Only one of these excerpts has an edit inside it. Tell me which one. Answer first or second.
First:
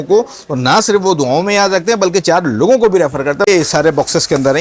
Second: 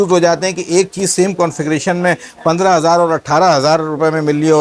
first